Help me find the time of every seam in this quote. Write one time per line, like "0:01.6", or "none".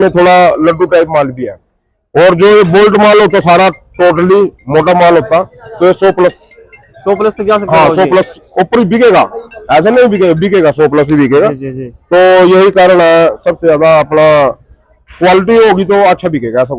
none